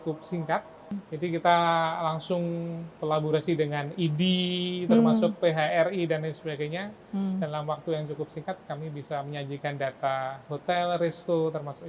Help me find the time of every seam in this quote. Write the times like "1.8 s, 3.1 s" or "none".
1.0 s